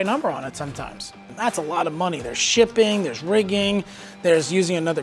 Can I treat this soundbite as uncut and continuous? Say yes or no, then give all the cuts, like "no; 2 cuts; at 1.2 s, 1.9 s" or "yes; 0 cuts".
no; 1 cut; at 1.3 s